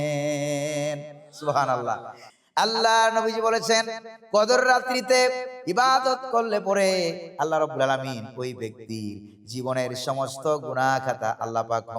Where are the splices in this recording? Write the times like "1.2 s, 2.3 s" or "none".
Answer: 2.1 s